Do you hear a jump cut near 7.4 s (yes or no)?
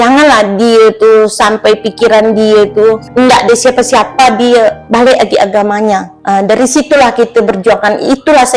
no